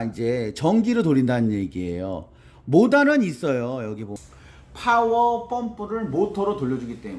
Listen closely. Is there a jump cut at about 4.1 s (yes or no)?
yes